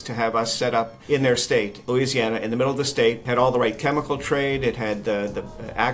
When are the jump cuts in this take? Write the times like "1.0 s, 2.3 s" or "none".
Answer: 1.0 s, 1.8 s, 3.2 s

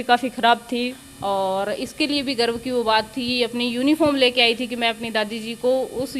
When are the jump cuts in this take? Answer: 1.0 s

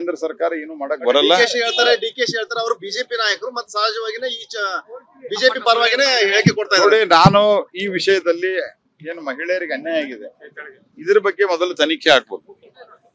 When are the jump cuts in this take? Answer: 7.1 s

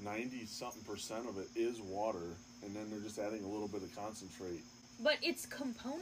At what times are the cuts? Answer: 4.8 s

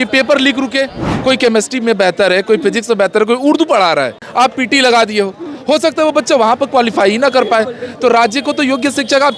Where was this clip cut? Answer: 1.0 s, 4.2 s

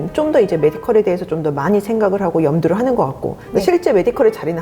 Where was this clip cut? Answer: none

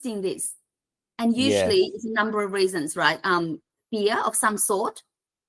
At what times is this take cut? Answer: none

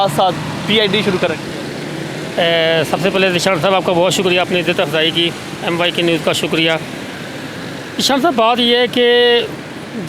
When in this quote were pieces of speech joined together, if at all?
none

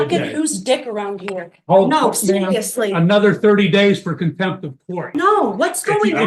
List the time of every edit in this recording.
5.0 s

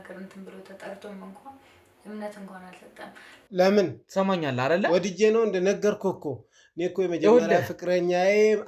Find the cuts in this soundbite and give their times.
3.4 s

